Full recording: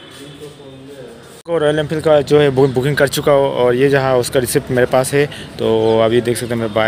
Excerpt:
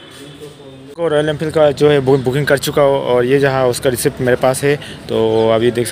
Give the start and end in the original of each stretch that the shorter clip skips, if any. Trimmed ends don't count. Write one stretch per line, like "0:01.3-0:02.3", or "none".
0:00.9-0:01.4

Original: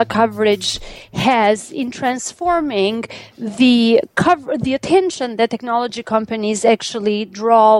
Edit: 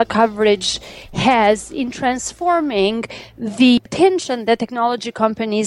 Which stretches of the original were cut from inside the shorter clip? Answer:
0:03.8-0:04.7

